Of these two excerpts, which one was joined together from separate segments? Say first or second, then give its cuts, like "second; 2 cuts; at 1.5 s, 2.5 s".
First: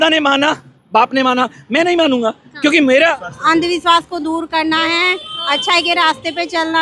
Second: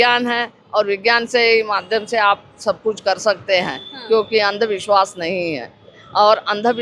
first; 1 cut; at 3.2 s